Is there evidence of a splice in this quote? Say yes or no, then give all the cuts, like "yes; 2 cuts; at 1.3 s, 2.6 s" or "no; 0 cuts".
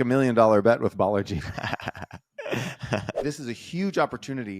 yes; 1 cut; at 3.2 s